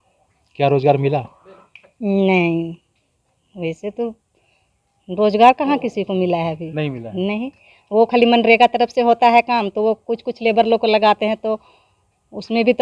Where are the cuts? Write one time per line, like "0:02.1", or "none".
none